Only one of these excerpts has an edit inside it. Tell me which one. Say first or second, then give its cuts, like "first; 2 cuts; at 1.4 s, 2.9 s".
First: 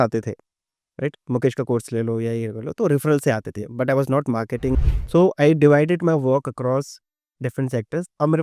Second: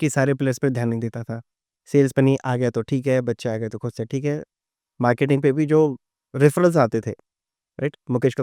first; 1 cut; at 4.9 s